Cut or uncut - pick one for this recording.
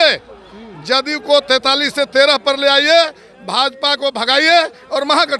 uncut